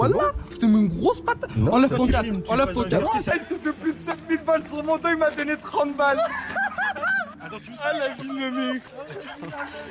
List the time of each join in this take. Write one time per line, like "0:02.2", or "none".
0:03.2